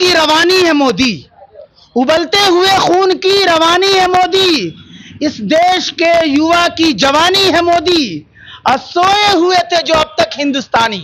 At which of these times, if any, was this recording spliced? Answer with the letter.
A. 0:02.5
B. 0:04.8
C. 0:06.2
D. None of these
D